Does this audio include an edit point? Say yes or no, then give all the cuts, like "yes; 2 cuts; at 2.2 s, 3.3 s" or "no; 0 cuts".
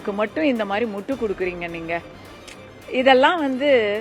no; 0 cuts